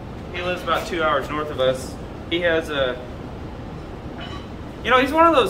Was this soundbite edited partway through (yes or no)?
no